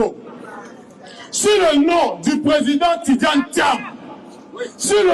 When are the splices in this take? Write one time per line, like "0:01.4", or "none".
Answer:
none